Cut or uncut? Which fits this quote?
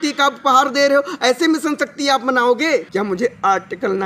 cut